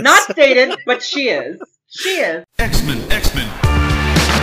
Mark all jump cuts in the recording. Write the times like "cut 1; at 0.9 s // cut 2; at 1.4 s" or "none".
cut 1; at 2.4 s